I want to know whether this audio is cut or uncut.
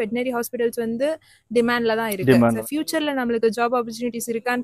cut